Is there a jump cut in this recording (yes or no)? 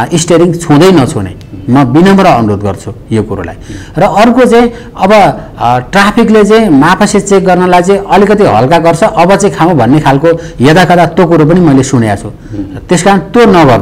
no